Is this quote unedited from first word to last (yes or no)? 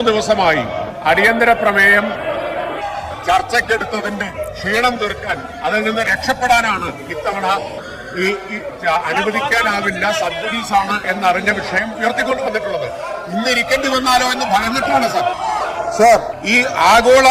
no